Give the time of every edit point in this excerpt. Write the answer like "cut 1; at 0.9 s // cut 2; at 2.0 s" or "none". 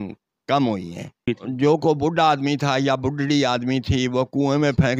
cut 1; at 1.2 s